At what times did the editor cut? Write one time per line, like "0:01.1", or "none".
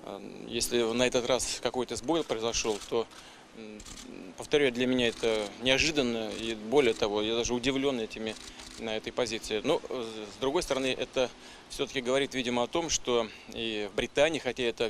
none

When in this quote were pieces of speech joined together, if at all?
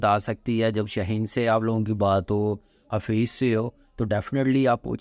none

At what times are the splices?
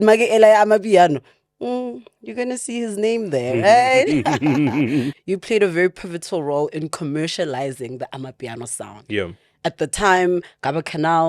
0:05.1

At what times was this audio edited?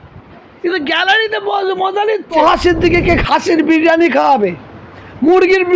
0:02.4

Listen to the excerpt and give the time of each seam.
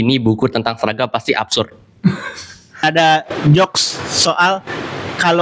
0:02.8

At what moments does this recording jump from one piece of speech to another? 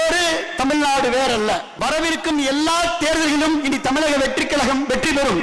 0:01.7

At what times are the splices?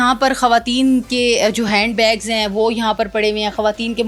none

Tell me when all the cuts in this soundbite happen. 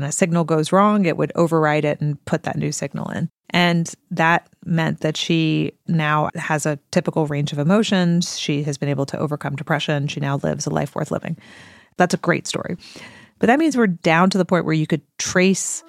0:03.4
0:06.3
0:12.8

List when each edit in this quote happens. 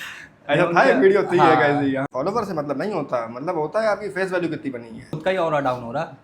0:02.0
0:05.2

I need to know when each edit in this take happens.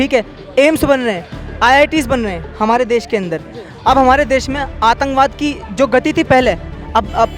none

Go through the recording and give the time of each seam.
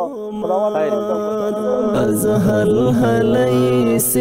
0:01.1

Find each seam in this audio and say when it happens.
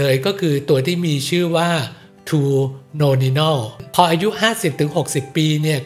0:03.8

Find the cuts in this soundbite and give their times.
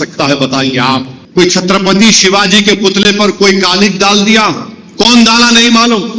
0:01.2

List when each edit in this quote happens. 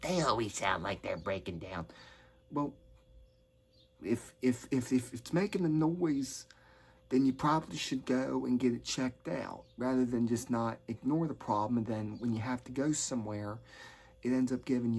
none

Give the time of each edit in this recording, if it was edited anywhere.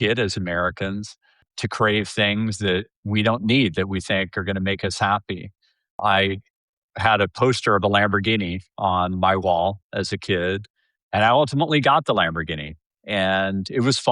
0:01.5
0:06.0

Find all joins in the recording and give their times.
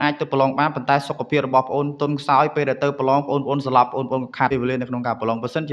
0:04.5

